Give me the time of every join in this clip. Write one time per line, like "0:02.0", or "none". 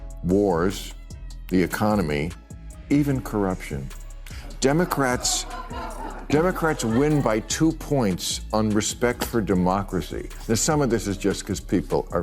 none